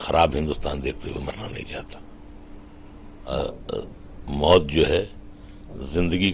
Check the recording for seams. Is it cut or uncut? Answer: cut